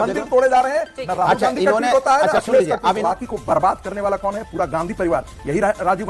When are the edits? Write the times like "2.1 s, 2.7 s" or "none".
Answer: 3.0 s